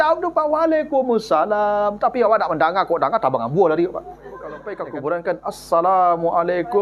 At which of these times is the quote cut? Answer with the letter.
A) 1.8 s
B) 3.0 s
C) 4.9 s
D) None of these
C